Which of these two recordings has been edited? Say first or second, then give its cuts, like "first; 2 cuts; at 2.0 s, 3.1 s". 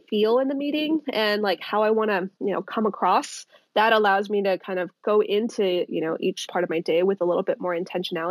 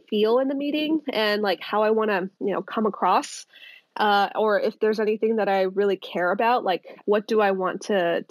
first; 2 cuts; at 3.6 s, 6.5 s